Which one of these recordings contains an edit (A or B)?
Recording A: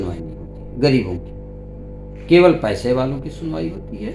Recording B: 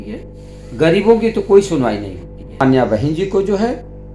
B